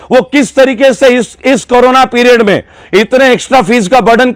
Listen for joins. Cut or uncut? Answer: uncut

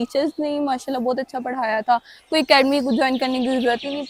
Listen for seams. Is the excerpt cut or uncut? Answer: uncut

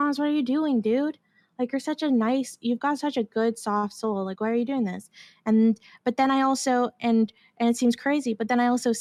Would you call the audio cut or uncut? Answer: uncut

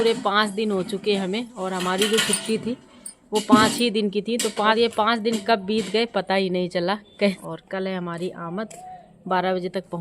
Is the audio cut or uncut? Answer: cut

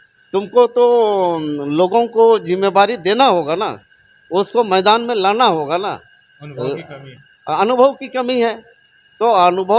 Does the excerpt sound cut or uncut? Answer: uncut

